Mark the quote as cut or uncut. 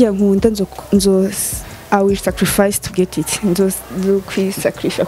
uncut